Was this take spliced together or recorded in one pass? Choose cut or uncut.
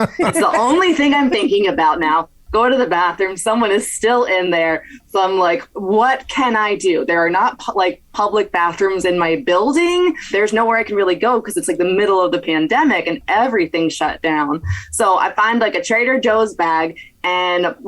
cut